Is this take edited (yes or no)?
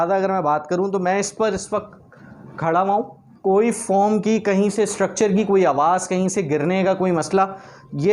no